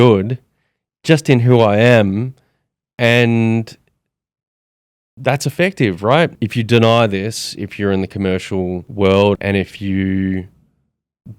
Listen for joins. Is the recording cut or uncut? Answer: cut